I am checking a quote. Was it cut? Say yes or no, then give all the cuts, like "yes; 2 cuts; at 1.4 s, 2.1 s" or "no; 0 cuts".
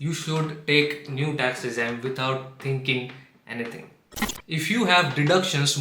yes; 1 cut; at 4.2 s